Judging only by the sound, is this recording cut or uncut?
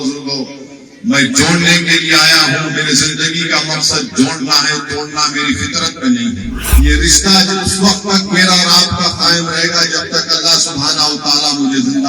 cut